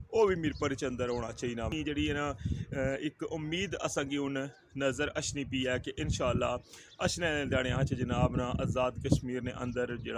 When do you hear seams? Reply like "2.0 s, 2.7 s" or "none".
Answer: 1.7 s